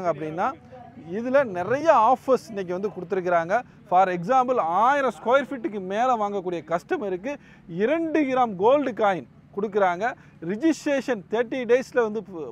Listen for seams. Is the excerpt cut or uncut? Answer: uncut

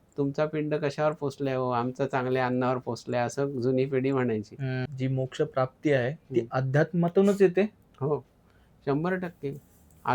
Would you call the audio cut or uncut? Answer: cut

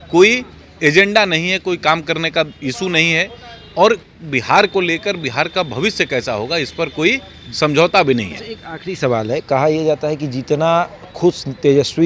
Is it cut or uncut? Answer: uncut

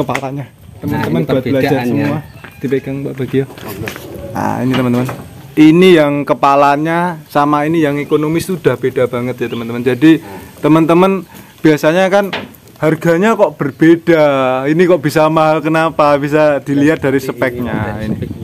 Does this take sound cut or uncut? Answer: uncut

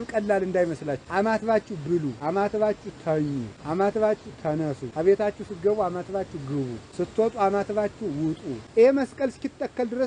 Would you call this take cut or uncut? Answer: cut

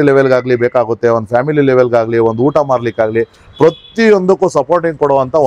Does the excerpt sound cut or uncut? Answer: uncut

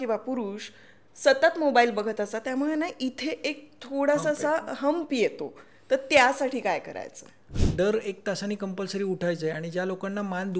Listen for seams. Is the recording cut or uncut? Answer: cut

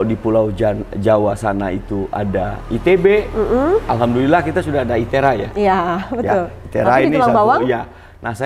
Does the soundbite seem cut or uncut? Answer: uncut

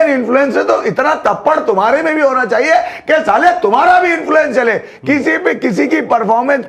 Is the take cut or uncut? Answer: uncut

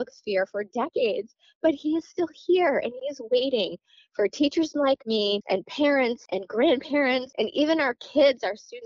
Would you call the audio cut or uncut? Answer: cut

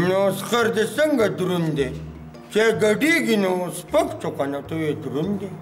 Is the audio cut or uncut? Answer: uncut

